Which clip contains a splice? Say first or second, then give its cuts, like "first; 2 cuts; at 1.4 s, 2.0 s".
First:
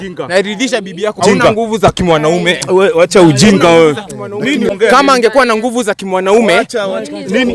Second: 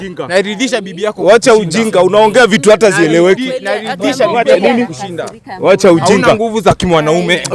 first; 2 cuts; at 1.2 s, 4.7 s